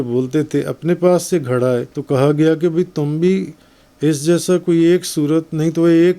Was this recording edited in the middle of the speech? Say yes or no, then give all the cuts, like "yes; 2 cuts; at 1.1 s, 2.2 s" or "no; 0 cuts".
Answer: yes; 1 cut; at 1.9 s